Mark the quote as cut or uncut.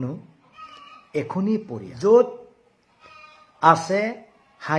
cut